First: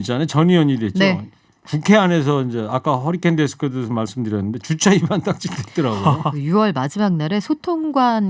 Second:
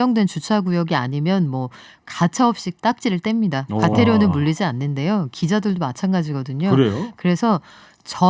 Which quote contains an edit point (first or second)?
first